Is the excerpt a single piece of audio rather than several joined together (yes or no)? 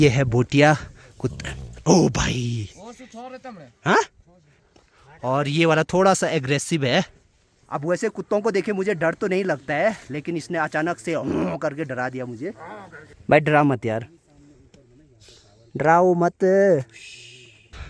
yes